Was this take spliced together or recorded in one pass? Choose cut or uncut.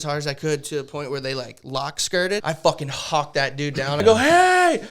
cut